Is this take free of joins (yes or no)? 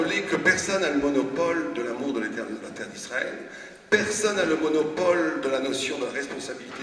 yes